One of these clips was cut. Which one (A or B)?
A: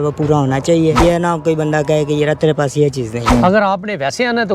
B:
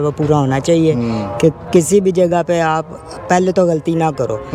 A